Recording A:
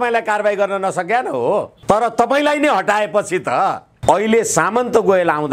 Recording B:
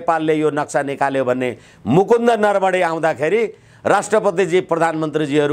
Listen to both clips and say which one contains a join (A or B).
A